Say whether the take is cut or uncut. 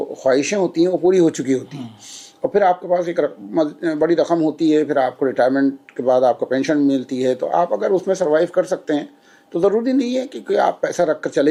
uncut